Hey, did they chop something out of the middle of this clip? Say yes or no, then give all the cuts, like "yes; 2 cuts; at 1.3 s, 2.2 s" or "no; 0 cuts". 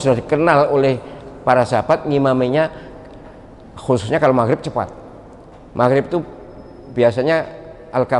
no; 0 cuts